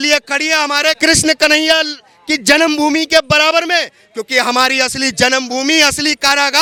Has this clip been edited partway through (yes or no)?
no